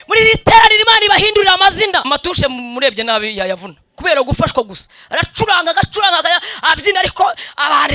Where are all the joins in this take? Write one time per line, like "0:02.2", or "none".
0:02.1